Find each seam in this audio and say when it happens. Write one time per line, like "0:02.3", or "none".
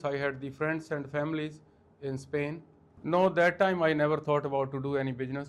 0:03.0